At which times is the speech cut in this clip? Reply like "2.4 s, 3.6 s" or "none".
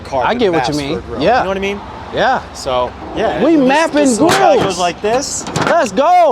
3.0 s